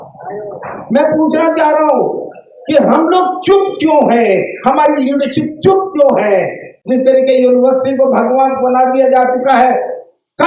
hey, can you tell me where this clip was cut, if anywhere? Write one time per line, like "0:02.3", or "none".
0:06.7